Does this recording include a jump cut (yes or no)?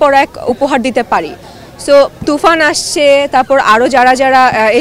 no